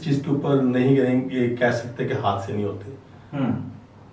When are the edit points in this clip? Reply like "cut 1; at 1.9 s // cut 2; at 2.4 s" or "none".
none